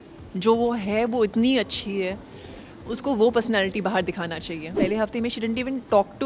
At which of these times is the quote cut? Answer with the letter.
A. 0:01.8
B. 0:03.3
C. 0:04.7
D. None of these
C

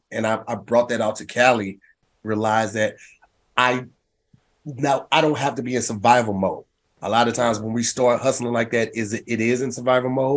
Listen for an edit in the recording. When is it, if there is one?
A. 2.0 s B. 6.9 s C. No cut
A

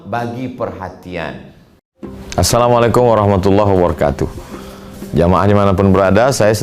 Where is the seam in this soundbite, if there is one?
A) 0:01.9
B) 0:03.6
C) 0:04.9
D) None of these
A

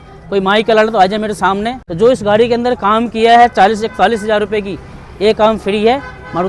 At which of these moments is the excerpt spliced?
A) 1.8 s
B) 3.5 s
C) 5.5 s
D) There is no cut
A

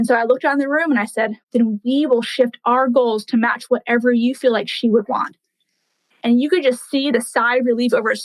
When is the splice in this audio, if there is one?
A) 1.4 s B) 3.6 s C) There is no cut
A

